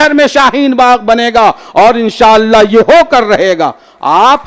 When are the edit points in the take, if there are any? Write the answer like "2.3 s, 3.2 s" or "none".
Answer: none